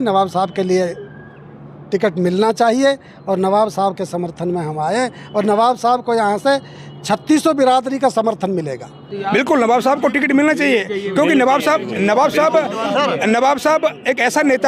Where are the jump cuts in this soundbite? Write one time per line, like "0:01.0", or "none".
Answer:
0:09.2